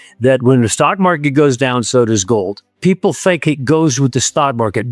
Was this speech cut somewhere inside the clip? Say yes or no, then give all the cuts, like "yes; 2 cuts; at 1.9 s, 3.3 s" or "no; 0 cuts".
yes; 1 cut; at 2.6 s